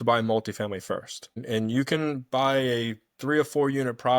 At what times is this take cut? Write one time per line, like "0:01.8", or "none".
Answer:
0:01.4